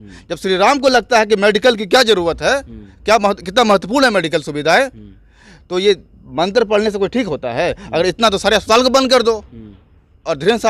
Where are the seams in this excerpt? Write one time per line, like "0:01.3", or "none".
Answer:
none